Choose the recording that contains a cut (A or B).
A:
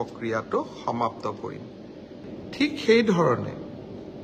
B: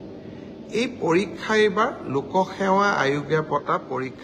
A